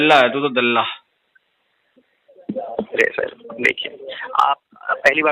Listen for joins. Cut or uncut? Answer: uncut